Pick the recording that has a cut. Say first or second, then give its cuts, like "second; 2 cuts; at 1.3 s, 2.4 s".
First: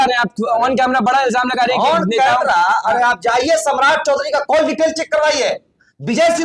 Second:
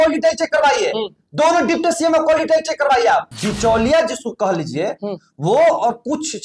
second; 1 cut; at 3.4 s